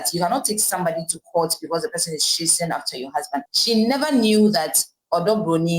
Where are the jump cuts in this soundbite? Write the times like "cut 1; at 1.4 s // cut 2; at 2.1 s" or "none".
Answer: cut 1; at 3.4 s